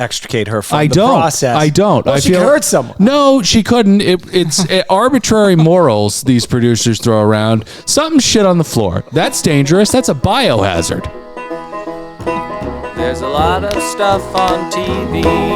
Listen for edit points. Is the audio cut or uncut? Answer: cut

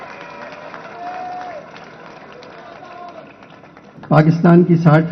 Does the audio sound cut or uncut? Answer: cut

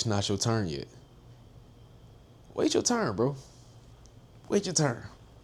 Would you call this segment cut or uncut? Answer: uncut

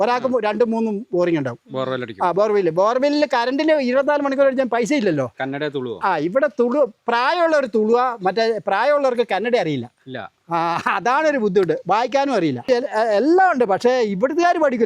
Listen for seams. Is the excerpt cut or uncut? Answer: cut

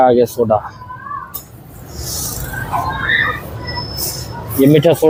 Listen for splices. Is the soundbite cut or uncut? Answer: uncut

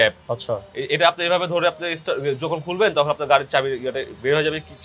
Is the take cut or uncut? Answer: uncut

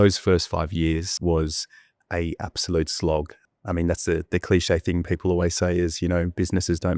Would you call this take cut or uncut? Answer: cut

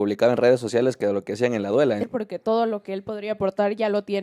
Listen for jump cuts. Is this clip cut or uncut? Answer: cut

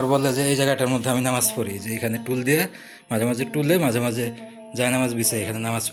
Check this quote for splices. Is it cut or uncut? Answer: uncut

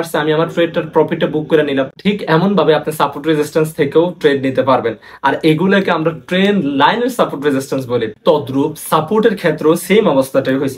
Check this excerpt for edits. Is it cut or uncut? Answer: uncut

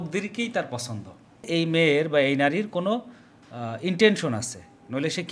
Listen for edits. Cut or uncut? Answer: cut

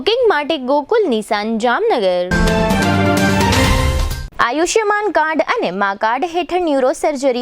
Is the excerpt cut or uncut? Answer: uncut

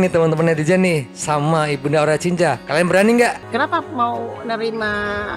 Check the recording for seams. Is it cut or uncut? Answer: cut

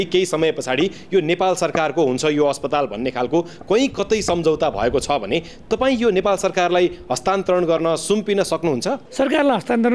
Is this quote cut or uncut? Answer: cut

